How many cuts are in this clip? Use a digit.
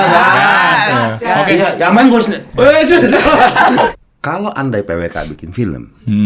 1